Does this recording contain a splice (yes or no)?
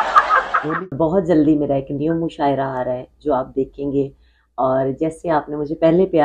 yes